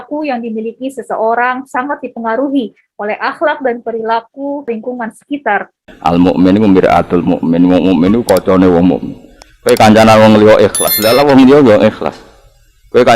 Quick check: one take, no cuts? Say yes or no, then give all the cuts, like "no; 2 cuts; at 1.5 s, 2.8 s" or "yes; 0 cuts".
no; 1 cut; at 5.9 s